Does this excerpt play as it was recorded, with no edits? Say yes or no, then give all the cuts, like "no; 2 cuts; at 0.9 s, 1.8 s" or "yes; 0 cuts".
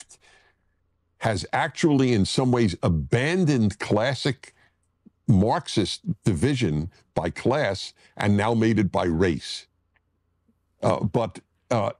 yes; 0 cuts